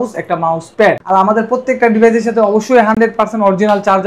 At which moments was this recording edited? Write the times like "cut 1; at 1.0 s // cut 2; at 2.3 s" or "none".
none